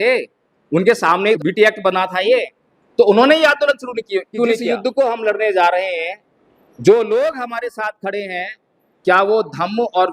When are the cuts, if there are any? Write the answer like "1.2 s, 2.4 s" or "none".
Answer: 1.4 s, 4.7 s